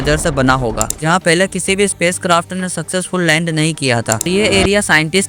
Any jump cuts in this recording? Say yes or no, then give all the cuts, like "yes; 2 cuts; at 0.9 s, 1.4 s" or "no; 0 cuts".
yes; 2 cuts; at 0.9 s, 4.3 s